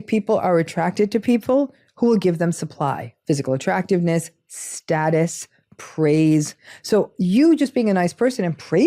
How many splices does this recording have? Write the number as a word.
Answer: one